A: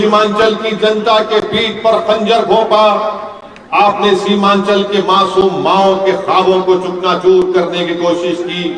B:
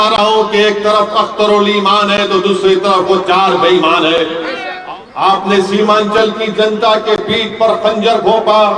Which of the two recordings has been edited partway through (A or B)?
B